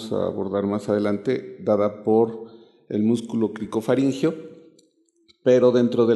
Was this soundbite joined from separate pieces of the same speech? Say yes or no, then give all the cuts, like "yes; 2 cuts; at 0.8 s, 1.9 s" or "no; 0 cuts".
yes; 1 cut; at 2.9 s